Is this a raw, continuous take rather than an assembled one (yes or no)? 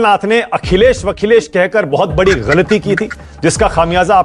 yes